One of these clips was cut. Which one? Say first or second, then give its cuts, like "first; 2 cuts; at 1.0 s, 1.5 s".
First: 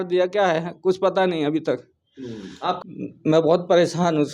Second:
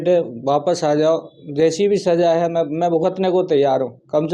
first; 1 cut; at 2.8 s